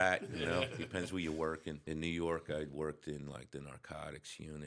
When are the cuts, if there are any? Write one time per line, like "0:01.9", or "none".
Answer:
0:01.8